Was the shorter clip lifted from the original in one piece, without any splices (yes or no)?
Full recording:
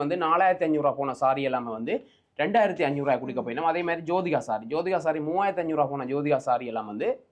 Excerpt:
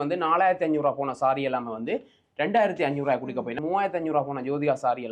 no